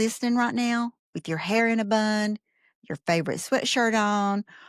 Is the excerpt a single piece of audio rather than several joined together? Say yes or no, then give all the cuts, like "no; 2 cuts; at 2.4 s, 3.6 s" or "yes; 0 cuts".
yes; 0 cuts